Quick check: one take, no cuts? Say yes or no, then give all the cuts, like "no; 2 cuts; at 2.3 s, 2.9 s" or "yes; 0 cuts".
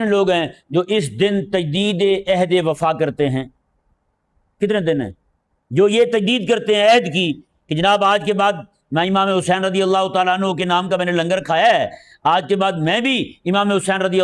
yes; 0 cuts